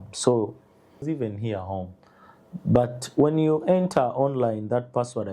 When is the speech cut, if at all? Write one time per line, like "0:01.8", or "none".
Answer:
0:01.0